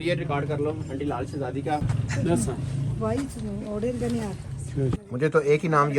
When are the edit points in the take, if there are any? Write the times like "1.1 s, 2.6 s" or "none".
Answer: 1.9 s, 5.0 s